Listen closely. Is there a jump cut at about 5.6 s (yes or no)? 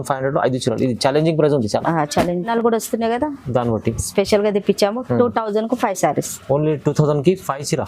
no